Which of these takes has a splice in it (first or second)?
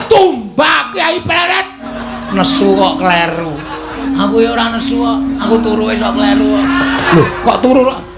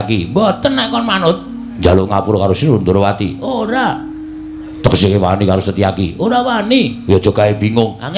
first